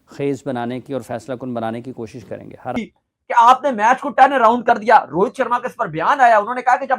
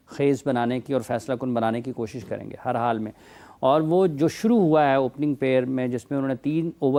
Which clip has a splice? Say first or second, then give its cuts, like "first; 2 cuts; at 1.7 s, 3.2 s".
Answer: first; 1 cut; at 2.7 s